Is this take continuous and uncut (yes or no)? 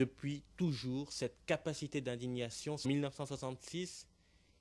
yes